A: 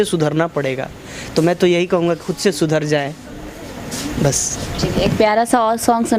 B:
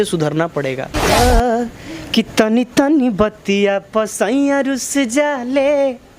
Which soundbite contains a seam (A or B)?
B